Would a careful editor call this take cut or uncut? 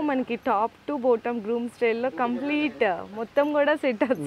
uncut